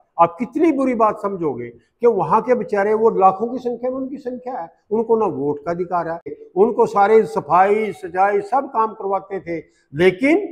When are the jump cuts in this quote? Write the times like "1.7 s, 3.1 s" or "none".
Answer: 6.3 s